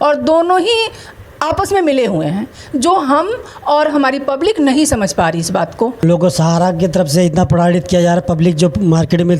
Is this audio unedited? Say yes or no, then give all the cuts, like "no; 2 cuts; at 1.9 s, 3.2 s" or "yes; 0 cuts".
no; 1 cut; at 6.0 s